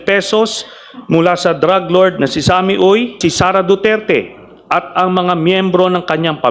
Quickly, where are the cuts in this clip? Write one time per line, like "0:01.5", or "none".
0:03.2